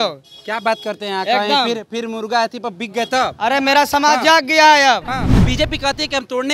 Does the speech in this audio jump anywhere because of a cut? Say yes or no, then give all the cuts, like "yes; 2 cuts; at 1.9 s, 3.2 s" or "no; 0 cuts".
yes; 1 cut; at 5.4 s